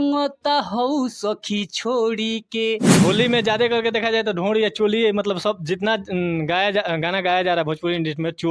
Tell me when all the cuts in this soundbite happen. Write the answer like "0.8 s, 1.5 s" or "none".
3.0 s